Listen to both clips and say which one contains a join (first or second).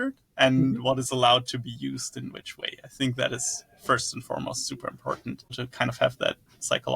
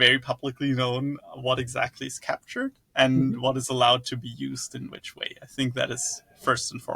first